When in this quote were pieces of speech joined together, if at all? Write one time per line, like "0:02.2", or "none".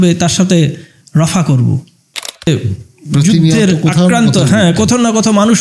0:02.5